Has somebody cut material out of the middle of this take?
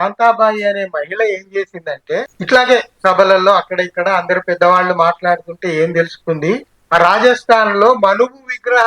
yes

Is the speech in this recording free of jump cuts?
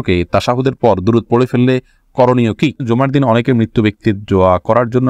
no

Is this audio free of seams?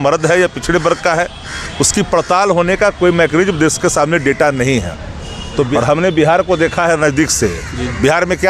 no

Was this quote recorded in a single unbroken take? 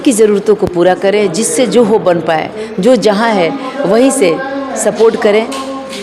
yes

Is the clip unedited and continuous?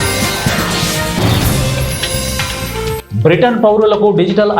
no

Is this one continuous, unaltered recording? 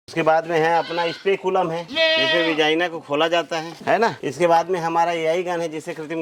yes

